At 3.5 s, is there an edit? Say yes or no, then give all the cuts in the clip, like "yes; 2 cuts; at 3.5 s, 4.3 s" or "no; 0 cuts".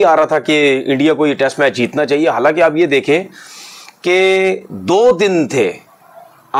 no; 0 cuts